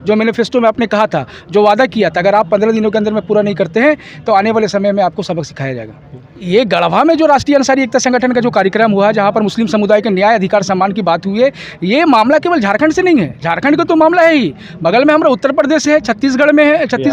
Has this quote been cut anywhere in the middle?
yes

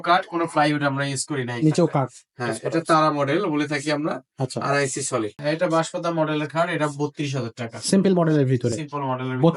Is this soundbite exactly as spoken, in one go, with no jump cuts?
no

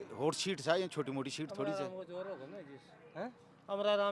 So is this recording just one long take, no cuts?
yes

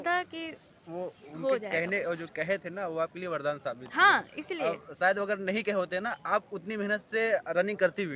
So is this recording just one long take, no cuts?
yes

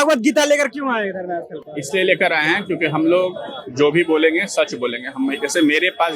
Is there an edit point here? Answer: no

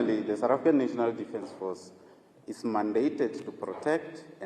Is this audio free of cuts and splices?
yes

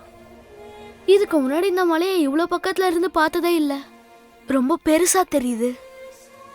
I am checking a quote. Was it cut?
no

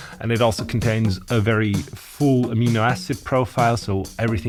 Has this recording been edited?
no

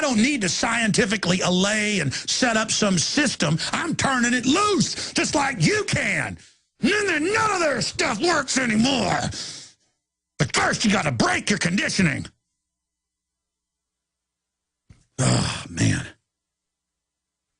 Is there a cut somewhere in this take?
yes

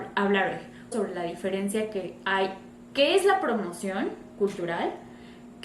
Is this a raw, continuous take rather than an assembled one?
no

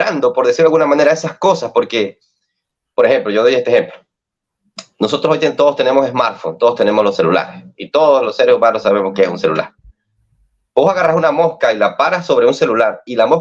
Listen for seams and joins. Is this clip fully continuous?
yes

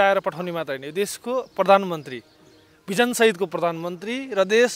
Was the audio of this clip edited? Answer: no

